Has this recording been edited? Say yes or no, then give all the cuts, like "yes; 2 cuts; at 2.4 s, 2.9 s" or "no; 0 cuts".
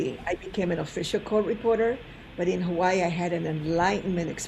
no; 0 cuts